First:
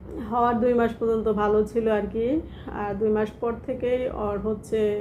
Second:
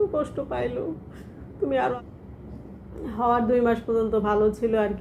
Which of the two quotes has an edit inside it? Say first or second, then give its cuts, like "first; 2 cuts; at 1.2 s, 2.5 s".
second; 1 cut; at 2.0 s